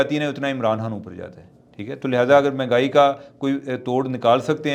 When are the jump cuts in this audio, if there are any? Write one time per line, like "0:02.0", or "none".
none